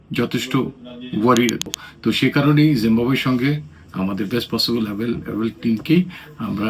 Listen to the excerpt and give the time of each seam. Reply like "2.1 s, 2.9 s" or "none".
1.7 s